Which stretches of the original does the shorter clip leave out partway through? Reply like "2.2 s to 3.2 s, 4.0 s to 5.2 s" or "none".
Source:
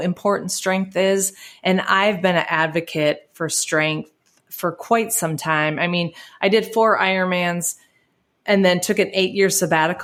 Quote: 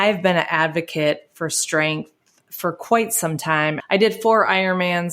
5.8 s to 6.3 s

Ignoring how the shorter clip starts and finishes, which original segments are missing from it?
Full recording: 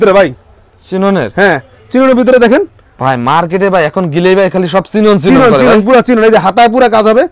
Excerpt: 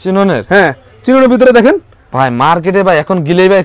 none

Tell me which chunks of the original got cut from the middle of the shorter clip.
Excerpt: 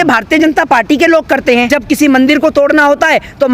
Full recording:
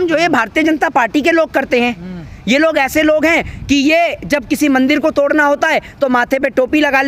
1.9 s to 4.3 s

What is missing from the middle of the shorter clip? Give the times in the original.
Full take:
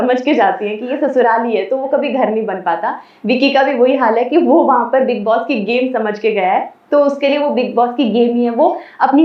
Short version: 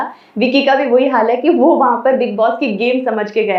none

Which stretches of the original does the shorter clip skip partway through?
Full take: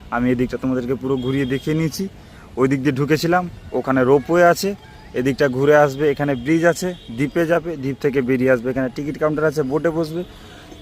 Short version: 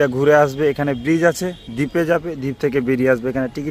none

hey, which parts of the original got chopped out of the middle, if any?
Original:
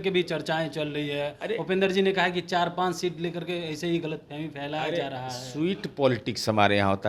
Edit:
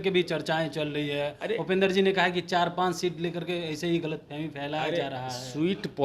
none

